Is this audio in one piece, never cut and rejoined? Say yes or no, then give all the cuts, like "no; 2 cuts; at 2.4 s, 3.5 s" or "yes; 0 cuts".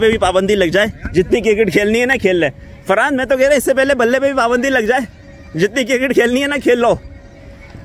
yes; 0 cuts